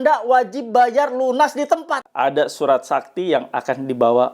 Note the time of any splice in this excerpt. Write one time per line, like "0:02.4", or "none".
0:02.0